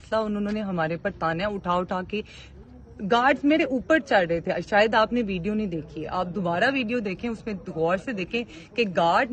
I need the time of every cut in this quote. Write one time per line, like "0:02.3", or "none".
none

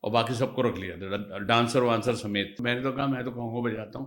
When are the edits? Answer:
0:02.6

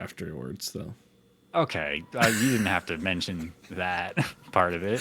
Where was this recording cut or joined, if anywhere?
none

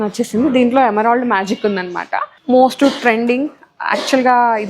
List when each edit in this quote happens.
0:02.3

